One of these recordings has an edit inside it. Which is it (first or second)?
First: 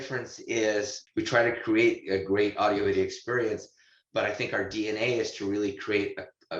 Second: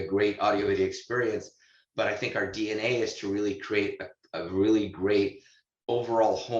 first